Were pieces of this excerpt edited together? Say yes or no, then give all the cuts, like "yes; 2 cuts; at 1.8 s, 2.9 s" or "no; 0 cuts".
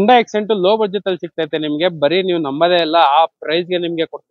no; 0 cuts